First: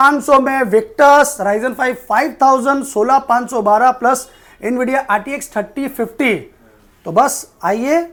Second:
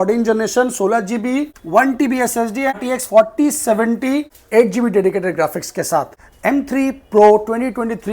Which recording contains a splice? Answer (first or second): second